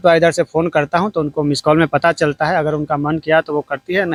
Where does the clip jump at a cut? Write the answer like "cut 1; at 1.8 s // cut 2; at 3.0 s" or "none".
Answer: none